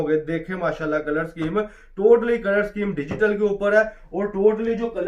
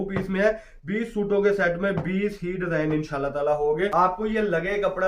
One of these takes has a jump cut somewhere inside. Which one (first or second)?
second